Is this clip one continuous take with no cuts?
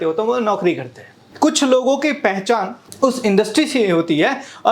no; 2 cuts; at 1.2 s, 2.8 s

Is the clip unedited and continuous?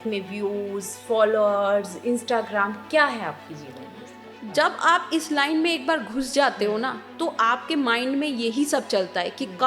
yes; 0 cuts

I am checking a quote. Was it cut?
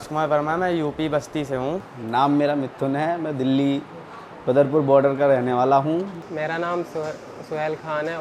yes; 2 cuts; at 1.9 s, 6.2 s

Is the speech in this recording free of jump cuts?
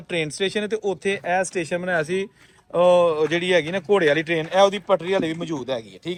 yes; 0 cuts

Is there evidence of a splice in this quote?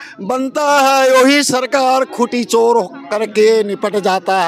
no; 0 cuts

